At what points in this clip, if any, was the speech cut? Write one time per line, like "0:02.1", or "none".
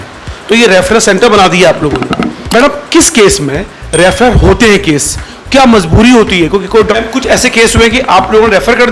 0:02.3
0:06.9